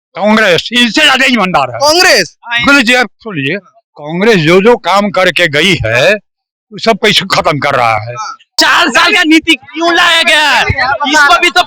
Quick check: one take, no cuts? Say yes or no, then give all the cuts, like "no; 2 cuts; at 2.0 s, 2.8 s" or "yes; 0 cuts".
no; 1 cut; at 8.6 s